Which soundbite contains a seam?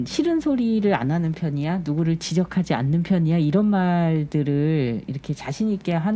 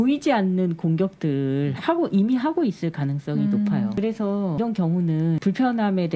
second; 1 cut; at 3.9 s

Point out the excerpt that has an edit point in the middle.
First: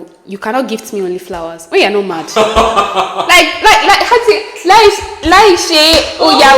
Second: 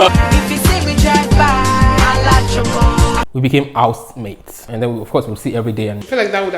second; 2 cuts; at 3.2 s, 4.5 s

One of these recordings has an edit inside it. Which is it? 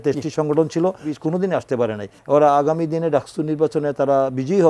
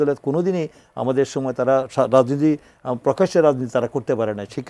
first; 2 cuts; at 1.1 s, 2.2 s

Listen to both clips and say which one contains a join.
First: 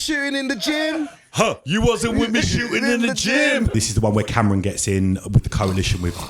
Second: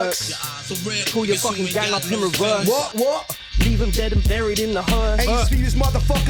first; 1 cut; at 3.7 s

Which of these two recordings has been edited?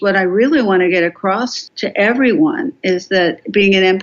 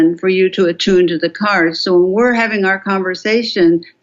first; 1 cut; at 1.6 s

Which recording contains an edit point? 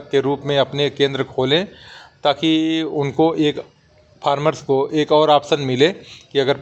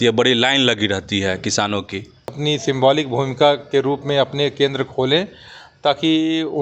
second; 1 cut; at 2.2 s

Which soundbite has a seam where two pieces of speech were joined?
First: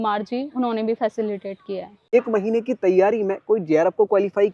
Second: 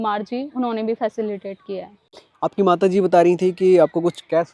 first; 1 cut; at 2.1 s

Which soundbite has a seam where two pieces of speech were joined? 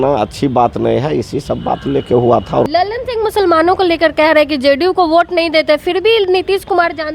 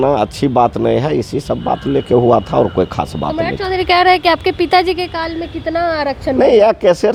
first; 1 cut; at 2.7 s

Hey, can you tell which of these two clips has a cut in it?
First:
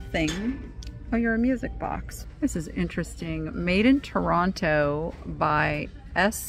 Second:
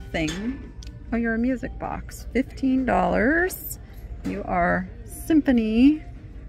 first; 1 cut; at 2.1 s

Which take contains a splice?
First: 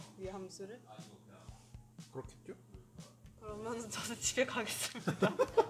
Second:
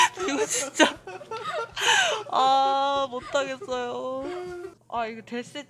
second; 1 cut; at 4.8 s

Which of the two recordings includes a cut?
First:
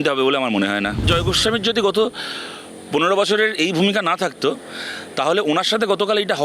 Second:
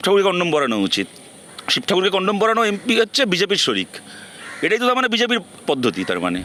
first; 1 cut; at 1.0 s

